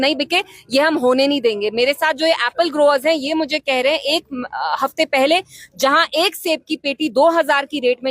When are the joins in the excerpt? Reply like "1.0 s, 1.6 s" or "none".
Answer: none